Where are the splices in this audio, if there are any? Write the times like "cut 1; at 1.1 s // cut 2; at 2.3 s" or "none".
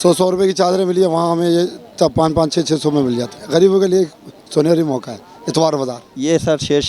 none